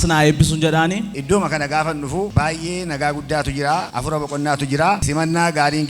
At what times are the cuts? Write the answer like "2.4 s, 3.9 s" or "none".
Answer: 1.1 s, 2.3 s, 3.9 s, 5.0 s